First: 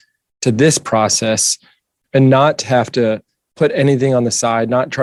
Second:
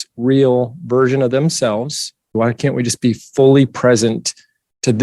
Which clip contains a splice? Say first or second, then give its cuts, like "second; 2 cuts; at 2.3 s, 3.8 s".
second; 1 cut; at 2.3 s